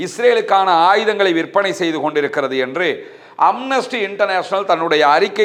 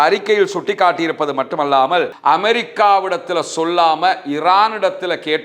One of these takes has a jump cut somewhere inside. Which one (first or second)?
second